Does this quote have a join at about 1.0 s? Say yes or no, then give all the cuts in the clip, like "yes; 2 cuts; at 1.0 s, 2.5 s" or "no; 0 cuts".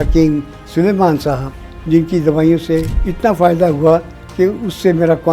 no; 1 cut; at 3.0 s